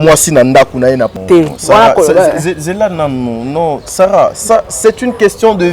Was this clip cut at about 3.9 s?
no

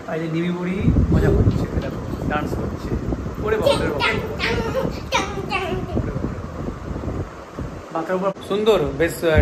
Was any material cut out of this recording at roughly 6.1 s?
no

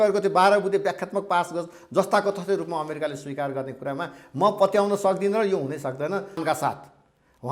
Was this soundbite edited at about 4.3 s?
no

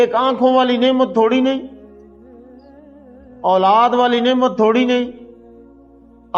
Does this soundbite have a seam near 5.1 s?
no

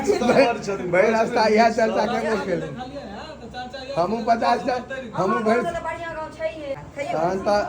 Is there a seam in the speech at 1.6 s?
no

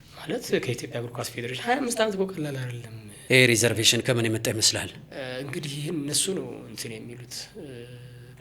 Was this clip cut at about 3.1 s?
yes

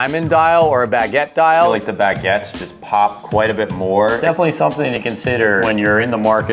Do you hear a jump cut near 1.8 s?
yes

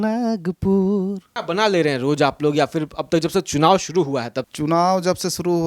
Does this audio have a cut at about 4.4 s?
yes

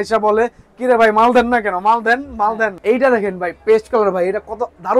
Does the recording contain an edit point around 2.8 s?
yes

